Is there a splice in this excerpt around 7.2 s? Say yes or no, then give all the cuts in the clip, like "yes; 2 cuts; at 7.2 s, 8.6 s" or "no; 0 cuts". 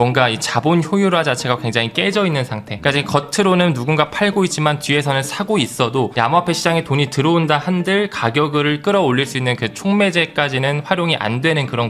no; 0 cuts